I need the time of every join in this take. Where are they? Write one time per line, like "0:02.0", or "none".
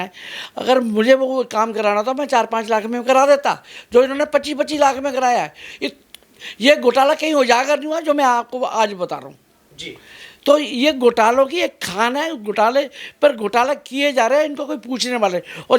none